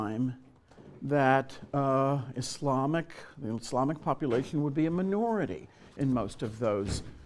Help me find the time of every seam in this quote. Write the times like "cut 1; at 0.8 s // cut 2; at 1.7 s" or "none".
cut 1; at 5.0 s